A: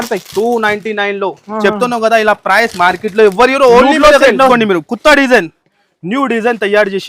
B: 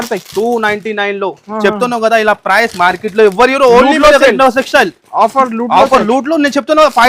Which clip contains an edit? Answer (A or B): A